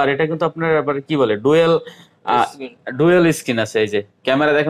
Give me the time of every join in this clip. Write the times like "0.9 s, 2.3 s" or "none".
none